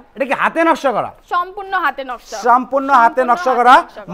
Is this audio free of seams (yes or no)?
no